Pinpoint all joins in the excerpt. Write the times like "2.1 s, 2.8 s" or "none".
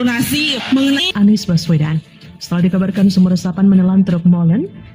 1.1 s